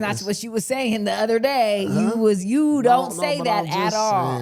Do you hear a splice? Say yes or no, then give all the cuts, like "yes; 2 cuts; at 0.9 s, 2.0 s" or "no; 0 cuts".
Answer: no; 0 cuts